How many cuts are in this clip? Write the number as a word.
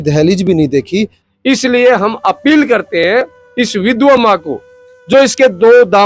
one